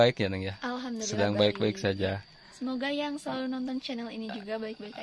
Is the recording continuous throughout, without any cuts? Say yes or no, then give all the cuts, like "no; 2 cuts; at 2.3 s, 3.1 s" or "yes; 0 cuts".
yes; 0 cuts